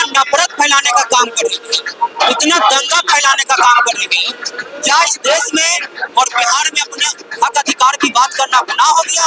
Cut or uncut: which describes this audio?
uncut